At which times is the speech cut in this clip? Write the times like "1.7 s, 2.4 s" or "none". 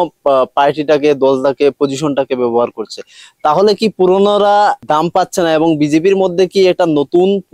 4.8 s